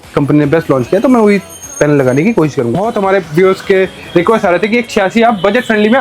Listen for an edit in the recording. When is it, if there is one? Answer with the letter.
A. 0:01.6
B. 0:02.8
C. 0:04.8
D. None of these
B